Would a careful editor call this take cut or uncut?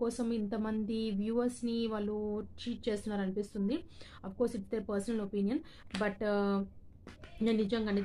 uncut